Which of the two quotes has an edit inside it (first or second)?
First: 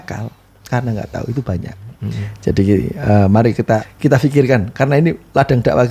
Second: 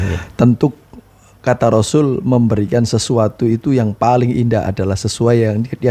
first